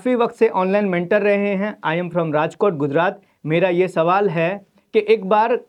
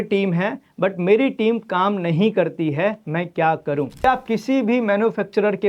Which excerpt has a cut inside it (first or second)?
second